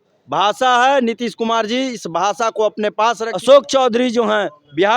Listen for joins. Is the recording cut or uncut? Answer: cut